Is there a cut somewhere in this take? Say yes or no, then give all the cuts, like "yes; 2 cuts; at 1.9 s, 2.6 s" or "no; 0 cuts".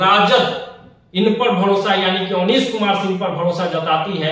no; 0 cuts